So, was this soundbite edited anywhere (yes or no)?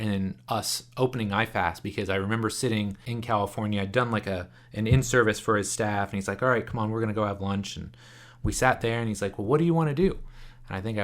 yes